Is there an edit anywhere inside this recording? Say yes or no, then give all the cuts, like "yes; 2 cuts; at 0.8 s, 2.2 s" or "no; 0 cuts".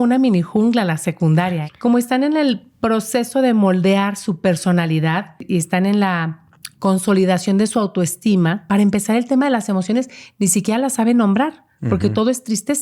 yes; 3 cuts; at 1.6 s, 5.4 s, 8.6 s